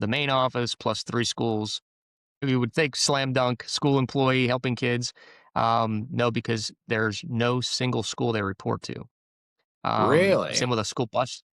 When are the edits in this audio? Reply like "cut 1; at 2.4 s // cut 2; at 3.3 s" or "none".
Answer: cut 1; at 2.4 s